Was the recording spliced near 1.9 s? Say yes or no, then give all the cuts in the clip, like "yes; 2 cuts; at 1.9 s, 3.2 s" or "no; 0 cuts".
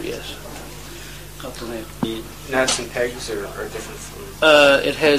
no; 1 cut; at 3.5 s